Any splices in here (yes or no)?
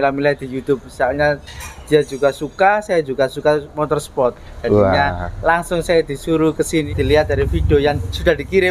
yes